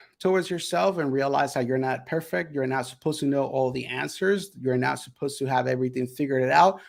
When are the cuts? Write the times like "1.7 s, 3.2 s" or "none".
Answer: none